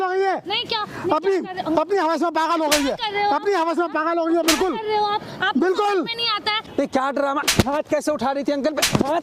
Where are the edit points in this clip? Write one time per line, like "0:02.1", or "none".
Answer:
0:06.6